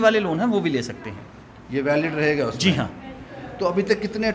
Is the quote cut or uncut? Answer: uncut